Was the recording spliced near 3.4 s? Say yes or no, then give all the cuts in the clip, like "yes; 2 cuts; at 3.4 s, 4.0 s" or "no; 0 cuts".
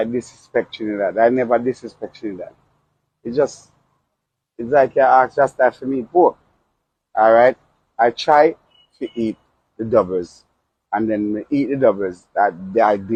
no; 0 cuts